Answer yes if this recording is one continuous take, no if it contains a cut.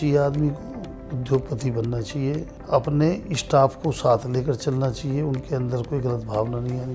no